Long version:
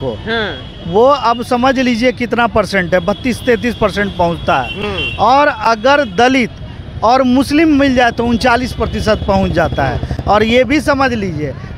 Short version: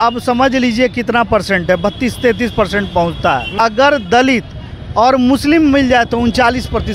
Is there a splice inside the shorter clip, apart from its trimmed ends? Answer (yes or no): yes